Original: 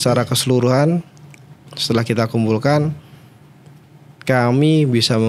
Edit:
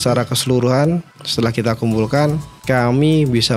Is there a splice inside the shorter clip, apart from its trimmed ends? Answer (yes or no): yes